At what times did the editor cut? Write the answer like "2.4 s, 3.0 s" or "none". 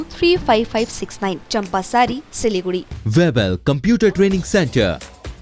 3.0 s